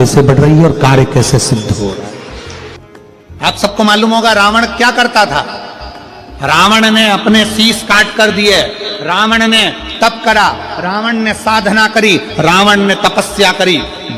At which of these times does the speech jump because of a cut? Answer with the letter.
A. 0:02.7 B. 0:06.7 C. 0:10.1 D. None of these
A